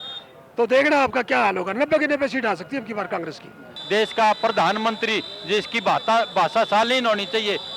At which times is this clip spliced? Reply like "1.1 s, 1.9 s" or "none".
3.7 s